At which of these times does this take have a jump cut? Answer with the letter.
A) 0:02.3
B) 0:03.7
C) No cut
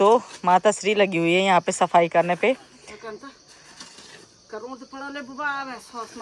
C